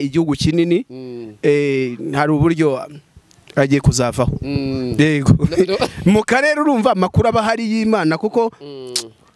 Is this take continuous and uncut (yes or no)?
yes